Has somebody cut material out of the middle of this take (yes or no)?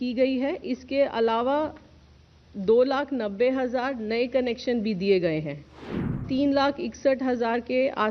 yes